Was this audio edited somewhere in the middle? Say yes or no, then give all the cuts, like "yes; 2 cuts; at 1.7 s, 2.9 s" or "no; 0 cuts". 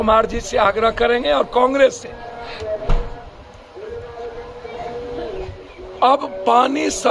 no; 0 cuts